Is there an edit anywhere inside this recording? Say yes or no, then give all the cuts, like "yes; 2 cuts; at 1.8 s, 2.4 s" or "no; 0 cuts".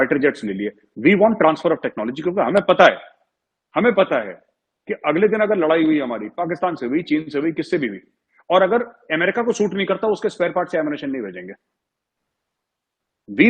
no; 0 cuts